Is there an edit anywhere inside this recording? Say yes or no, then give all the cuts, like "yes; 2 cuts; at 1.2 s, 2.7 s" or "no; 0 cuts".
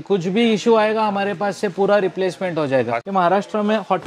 yes; 1 cut; at 3.0 s